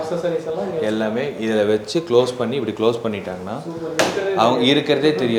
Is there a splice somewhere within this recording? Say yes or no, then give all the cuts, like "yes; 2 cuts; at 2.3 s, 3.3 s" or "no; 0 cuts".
no; 0 cuts